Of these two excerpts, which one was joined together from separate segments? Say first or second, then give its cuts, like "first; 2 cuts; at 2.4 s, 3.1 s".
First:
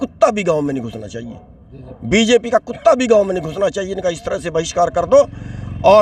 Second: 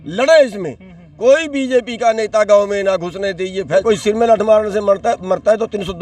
second; 1 cut; at 3.7 s